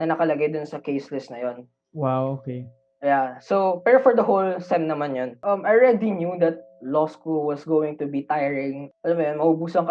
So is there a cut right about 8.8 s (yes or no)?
yes